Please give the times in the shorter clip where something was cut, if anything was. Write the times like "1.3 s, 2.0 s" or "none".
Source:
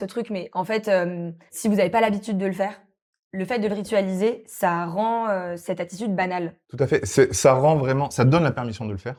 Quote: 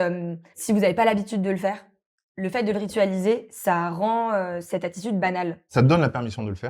5.7 s